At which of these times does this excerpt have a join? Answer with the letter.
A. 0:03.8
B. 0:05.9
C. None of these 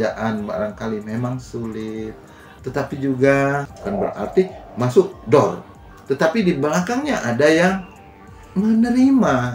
A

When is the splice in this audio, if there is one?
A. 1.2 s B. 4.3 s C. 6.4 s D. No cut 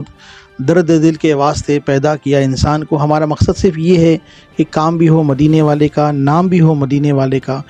D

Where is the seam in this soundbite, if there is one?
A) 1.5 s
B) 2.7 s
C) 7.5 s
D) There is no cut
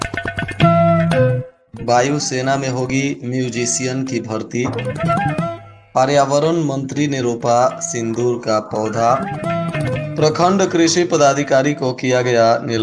A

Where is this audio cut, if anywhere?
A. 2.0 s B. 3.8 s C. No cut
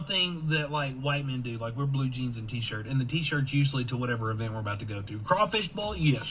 B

